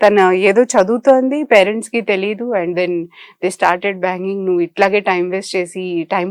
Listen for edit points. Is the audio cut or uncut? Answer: uncut